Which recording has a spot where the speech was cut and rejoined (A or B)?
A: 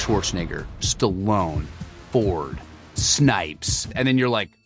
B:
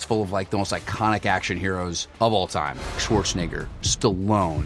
B